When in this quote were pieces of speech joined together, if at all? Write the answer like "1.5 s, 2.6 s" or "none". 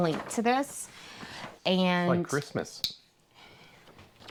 none